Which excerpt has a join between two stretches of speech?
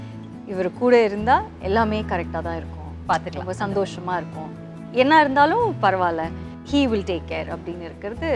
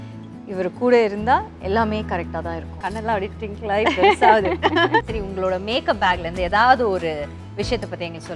second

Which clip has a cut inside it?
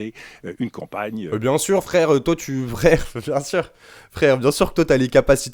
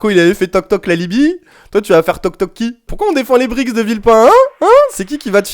second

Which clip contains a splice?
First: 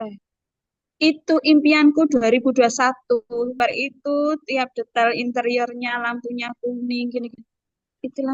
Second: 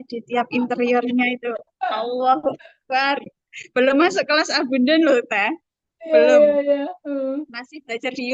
first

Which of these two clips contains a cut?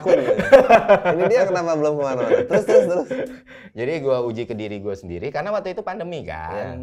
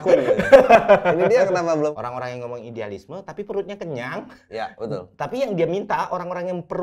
second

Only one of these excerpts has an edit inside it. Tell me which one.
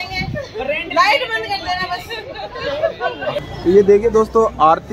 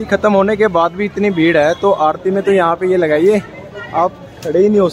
first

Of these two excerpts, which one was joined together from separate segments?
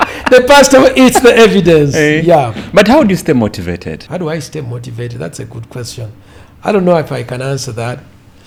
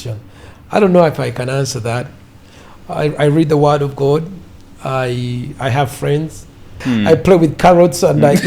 second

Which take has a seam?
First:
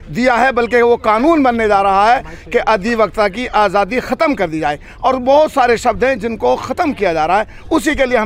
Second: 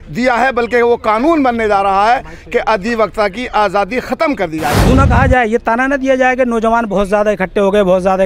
second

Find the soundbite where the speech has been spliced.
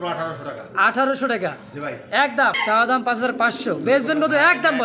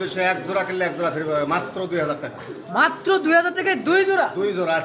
first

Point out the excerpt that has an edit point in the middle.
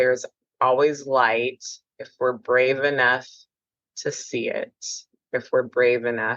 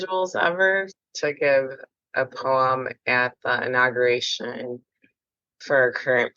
second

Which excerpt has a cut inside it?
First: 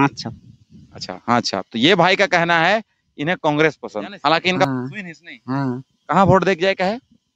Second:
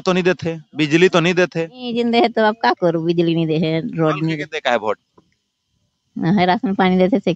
first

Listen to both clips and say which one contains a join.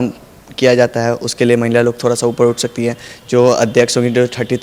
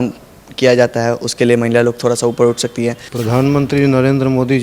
second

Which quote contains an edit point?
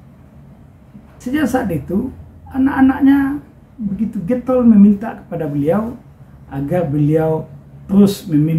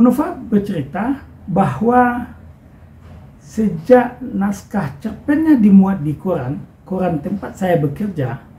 first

